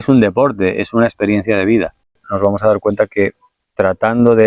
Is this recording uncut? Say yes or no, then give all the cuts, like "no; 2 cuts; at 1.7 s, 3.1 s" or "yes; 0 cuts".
no; 1 cut; at 2.3 s